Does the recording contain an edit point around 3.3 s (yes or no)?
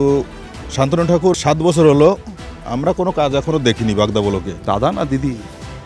no